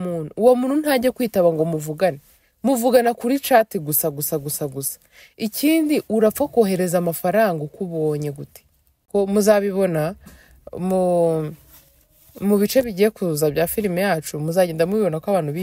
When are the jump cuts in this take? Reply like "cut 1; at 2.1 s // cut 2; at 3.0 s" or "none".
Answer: cut 1; at 9.1 s